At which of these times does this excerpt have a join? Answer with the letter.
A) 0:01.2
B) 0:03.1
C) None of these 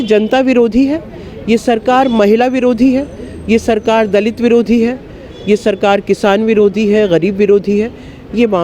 C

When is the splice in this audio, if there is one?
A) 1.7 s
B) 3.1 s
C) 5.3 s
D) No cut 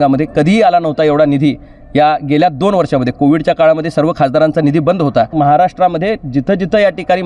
C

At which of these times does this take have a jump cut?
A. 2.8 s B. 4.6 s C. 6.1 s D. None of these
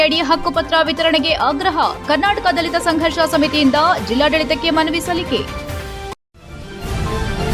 C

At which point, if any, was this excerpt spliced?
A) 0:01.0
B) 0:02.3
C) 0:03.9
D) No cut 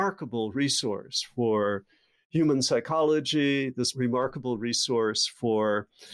C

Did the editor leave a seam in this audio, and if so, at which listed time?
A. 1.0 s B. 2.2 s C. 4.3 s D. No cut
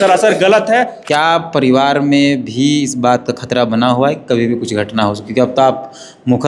A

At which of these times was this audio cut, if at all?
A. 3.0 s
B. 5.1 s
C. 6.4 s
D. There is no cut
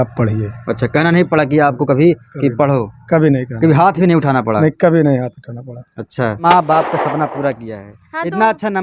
C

